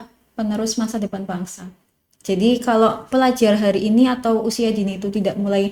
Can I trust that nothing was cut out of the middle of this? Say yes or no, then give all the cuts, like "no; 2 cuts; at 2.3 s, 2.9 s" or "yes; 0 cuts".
yes; 0 cuts